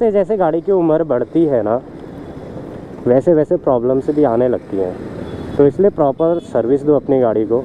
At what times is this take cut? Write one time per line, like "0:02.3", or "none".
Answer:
none

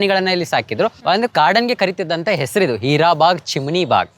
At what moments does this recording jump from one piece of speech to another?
0:01.0

